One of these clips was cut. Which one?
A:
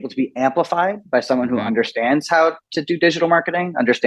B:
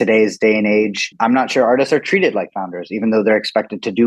B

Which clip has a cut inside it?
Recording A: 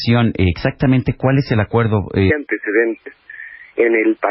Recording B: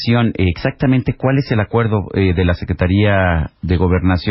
B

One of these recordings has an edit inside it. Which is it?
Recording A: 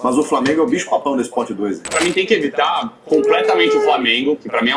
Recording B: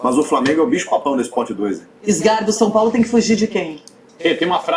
A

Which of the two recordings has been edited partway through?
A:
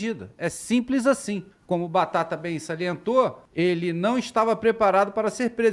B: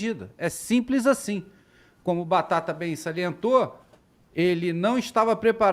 A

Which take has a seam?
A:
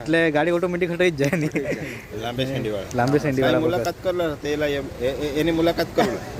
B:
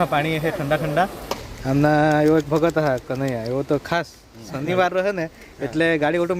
B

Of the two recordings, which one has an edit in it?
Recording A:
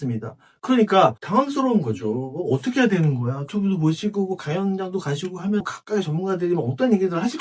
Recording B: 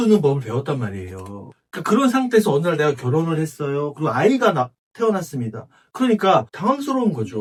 A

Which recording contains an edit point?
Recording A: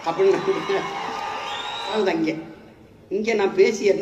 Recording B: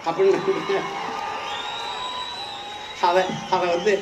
A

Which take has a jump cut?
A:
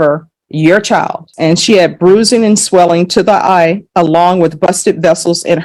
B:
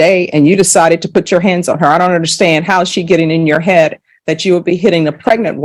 A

